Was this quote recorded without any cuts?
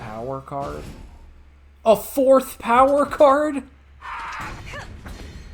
yes; 0 cuts

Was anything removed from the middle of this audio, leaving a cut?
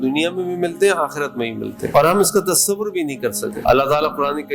yes; 1 cut; at 3.5 s

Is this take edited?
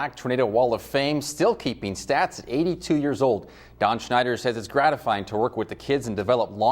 no; 0 cuts

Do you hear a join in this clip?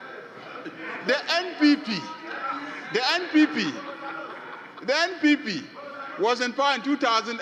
no; 0 cuts

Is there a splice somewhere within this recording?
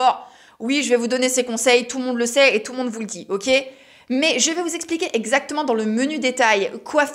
no; 0 cuts

